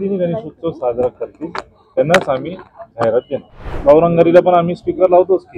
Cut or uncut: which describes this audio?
cut